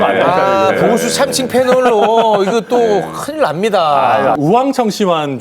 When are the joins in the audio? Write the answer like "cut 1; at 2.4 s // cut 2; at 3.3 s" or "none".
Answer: cut 1; at 4.4 s